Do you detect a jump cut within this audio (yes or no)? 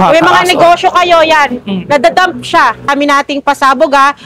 yes